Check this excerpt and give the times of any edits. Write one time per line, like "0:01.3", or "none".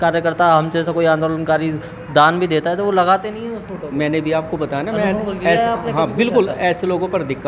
none